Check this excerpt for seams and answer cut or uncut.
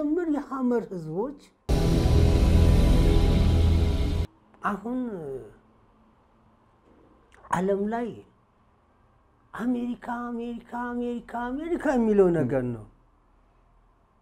cut